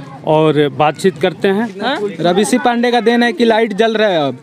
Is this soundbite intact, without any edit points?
no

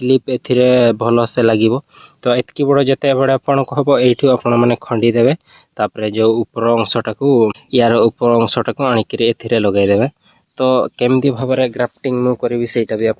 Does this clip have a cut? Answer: yes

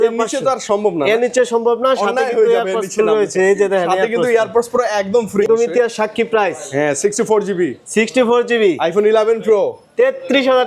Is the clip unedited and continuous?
no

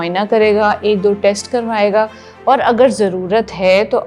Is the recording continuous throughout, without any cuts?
yes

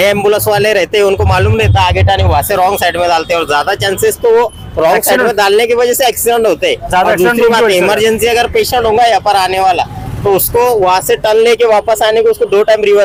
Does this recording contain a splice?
no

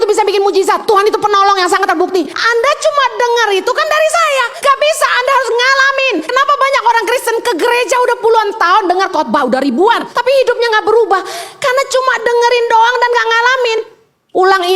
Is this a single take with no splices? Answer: no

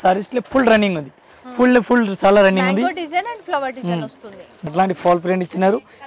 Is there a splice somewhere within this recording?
yes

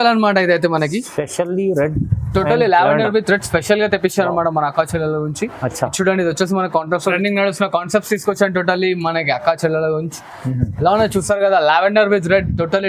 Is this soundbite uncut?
no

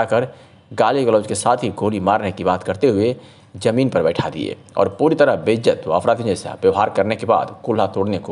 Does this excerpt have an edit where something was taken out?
no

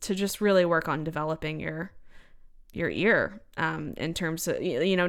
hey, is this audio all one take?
yes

